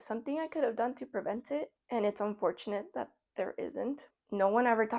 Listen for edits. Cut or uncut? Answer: cut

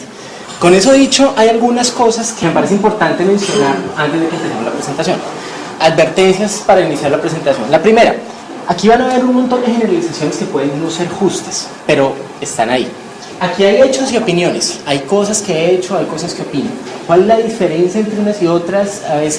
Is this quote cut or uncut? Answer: uncut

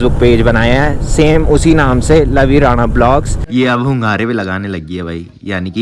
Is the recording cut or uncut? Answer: cut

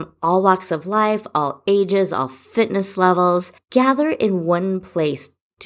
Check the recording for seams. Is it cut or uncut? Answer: cut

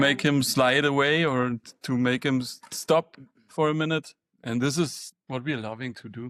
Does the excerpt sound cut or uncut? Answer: uncut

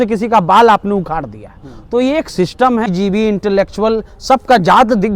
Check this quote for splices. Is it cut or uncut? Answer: cut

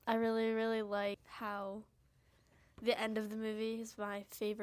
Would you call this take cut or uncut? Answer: cut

